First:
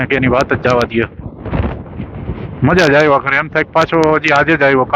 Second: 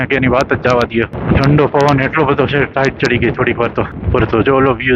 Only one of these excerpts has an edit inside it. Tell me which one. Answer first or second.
second